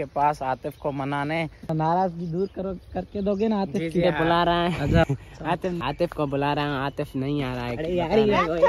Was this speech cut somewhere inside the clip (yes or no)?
yes